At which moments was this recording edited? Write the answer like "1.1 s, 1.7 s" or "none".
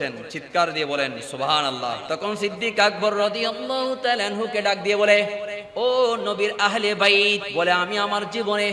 2.0 s, 7.4 s